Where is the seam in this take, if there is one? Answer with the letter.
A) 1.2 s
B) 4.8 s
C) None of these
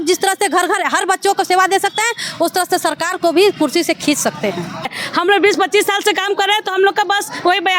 B